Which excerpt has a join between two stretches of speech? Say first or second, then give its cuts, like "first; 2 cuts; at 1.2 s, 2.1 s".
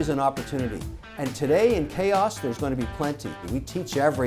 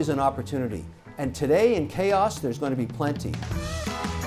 first; 1 cut; at 3.3 s